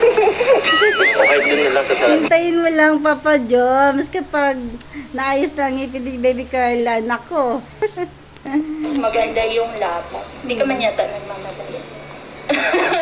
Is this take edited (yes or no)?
yes